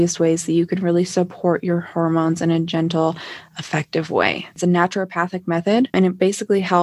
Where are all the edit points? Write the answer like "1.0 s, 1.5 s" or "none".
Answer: 4.6 s, 5.9 s